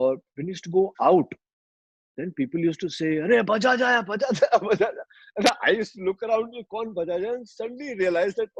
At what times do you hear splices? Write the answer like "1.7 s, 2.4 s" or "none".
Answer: none